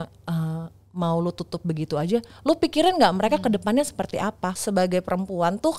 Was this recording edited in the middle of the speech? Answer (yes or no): yes